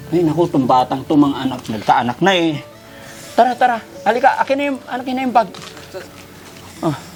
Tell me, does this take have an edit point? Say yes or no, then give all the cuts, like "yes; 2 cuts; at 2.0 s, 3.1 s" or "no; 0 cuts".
no; 0 cuts